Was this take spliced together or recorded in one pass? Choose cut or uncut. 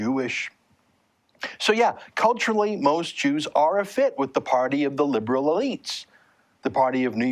cut